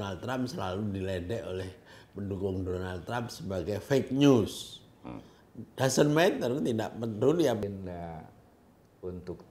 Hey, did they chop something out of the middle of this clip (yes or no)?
yes